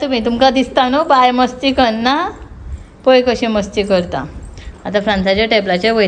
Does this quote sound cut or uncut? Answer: uncut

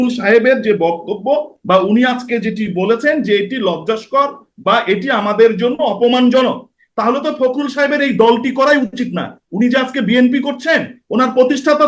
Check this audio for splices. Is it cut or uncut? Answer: uncut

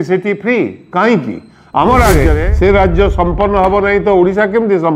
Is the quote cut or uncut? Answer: cut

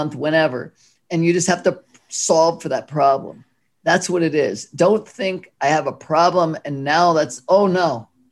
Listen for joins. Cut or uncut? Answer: uncut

